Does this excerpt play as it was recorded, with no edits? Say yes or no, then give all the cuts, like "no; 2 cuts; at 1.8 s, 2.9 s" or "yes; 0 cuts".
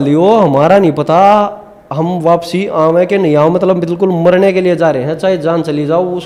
yes; 0 cuts